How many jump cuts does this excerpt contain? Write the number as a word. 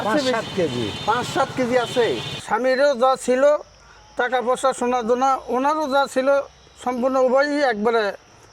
one